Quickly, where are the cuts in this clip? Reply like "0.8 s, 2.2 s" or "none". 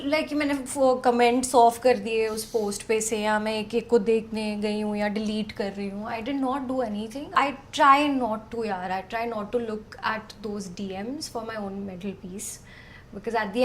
7.3 s